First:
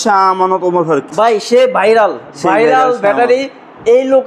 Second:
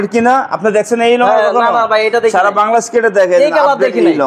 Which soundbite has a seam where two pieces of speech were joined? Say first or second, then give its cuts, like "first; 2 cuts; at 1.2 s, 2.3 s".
first; 1 cut; at 1.1 s